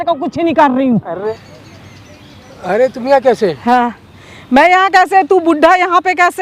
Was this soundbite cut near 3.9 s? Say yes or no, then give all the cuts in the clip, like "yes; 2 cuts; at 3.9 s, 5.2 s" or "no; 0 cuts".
no; 1 cut; at 1.2 s